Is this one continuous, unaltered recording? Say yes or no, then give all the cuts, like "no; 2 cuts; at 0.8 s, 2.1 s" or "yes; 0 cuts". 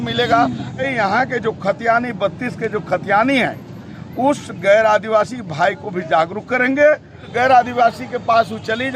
no; 2 cuts; at 0.9 s, 7.2 s